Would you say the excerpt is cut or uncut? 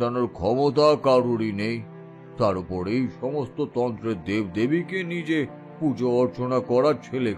uncut